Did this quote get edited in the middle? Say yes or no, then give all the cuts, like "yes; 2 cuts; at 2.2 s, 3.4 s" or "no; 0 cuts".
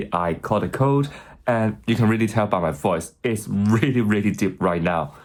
no; 0 cuts